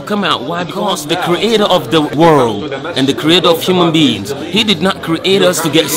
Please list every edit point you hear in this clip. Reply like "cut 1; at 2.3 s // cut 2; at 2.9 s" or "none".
cut 1; at 0.9 s // cut 2; at 2.1 s